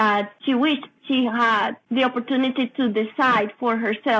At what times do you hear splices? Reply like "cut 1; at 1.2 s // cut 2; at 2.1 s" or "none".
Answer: cut 1; at 0.9 s // cut 2; at 1.8 s